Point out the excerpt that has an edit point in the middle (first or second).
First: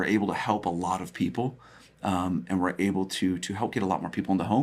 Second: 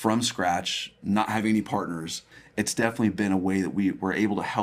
second